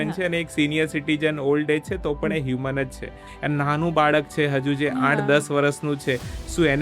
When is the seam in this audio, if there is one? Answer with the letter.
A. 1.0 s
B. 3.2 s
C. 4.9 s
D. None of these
B